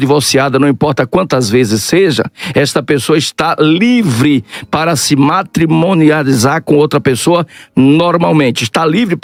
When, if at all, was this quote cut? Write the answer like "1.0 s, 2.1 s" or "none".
none